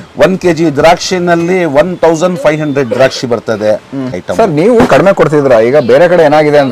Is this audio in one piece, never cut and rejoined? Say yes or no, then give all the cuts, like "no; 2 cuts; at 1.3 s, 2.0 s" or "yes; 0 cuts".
no; 1 cut; at 4.2 s